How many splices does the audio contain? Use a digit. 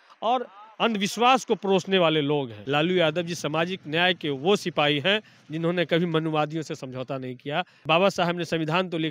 2